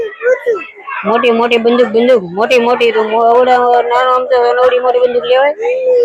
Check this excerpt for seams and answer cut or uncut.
uncut